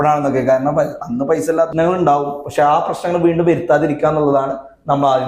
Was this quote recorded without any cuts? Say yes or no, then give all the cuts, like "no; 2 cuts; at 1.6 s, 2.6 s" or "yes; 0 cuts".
no; 1 cut; at 1.7 s